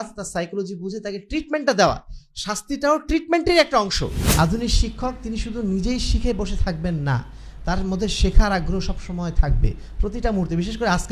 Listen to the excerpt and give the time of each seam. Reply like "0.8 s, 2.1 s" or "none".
4.2 s